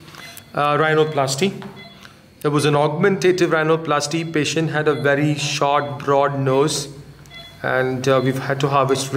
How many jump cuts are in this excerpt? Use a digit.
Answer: 0